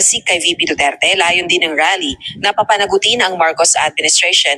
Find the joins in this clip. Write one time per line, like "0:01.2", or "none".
none